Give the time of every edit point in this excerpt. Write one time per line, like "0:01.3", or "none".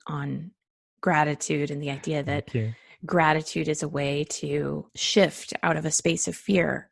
0:04.9